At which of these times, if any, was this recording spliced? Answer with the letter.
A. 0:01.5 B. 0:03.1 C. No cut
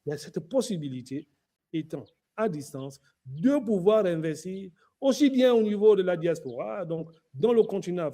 A